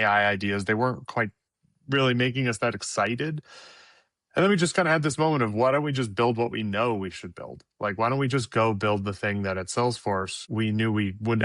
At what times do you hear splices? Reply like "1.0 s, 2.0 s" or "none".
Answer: none